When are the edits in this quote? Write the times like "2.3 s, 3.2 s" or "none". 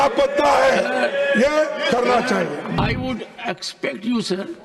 2.8 s